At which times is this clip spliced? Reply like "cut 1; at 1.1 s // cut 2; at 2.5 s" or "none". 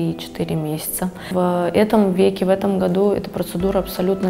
cut 1; at 1.3 s